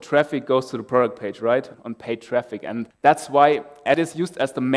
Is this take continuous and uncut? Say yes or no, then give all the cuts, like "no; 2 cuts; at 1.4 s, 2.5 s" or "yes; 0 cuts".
no; 3 cuts; at 1.7 s, 2.9 s, 4.0 s